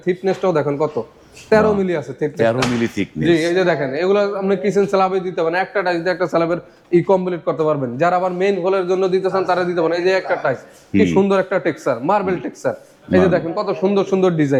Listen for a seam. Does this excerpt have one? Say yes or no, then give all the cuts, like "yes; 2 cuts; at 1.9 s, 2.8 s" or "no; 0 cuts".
no; 0 cuts